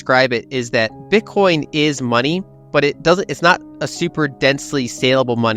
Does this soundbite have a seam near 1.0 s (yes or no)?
yes